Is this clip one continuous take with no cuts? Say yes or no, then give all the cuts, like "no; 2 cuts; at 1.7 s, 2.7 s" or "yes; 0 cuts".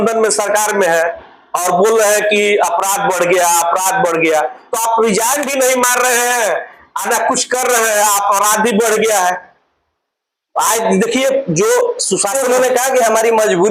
yes; 0 cuts